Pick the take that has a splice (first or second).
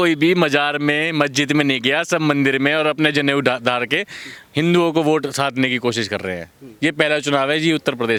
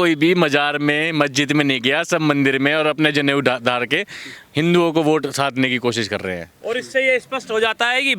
second